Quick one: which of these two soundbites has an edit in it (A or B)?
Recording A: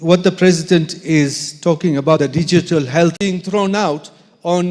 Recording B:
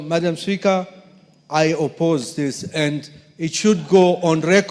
A